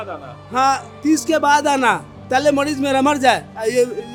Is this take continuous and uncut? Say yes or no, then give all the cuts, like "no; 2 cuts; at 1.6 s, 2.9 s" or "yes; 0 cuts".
yes; 0 cuts